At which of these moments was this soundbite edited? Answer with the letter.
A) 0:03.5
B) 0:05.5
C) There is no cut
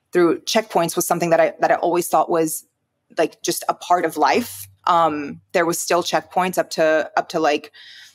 C